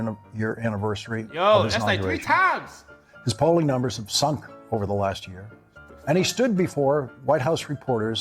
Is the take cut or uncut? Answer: uncut